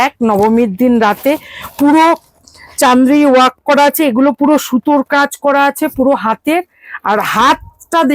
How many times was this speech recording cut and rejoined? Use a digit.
0